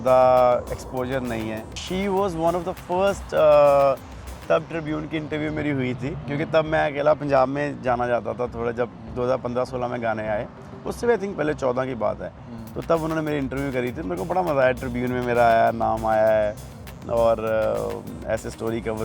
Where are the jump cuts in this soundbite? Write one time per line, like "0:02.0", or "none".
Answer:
0:01.8